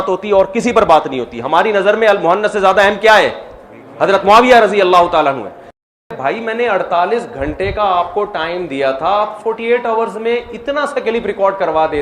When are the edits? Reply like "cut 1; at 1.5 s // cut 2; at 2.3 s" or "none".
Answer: cut 1; at 6.0 s